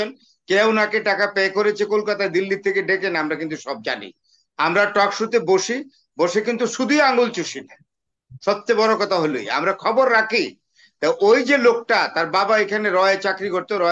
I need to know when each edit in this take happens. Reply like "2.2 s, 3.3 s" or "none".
none